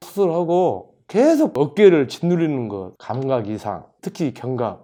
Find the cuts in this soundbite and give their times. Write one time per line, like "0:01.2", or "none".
none